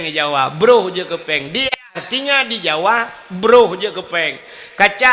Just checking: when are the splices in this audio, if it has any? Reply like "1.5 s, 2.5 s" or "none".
1.6 s

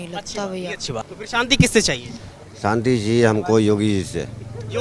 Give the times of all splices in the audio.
1.1 s

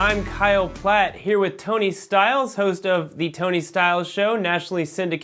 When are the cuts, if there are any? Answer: none

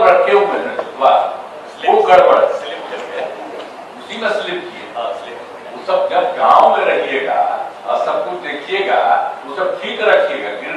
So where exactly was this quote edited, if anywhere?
none

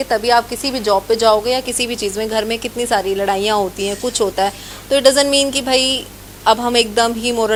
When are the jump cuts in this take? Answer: none

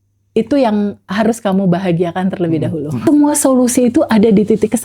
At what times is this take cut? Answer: 3.0 s

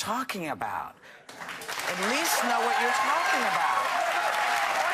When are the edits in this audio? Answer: none

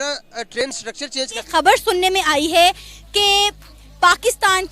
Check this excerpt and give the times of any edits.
1.4 s

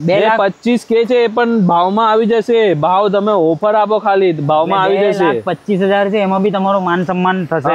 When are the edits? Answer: none

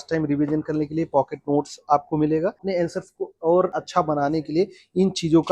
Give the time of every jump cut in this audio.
2.6 s, 3.8 s

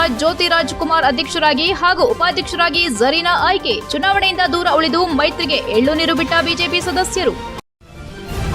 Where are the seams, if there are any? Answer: 7.5 s

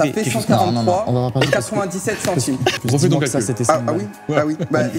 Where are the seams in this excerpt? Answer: 2.7 s

